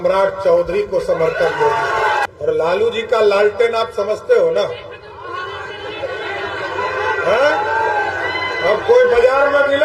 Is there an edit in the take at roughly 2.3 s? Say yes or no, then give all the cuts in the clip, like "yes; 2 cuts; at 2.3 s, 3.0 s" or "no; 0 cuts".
yes; 1 cut; at 2.3 s